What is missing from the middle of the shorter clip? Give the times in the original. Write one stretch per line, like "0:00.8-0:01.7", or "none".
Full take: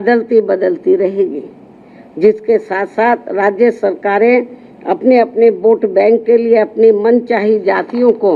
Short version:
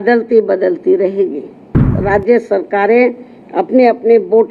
0:02.0-0:03.3